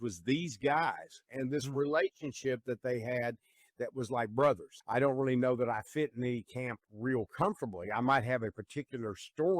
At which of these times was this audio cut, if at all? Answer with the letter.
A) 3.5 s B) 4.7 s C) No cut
B